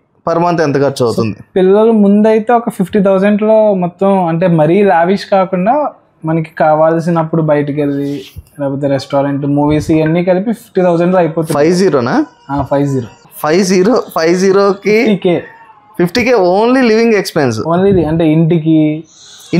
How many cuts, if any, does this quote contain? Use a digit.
0